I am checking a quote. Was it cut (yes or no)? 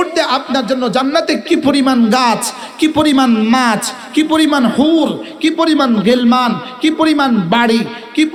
no